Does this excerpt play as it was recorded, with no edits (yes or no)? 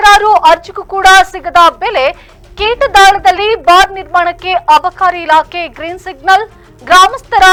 yes